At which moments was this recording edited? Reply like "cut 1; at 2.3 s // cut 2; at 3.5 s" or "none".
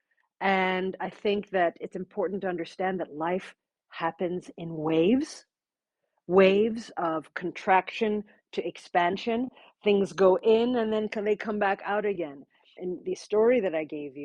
cut 1; at 12.8 s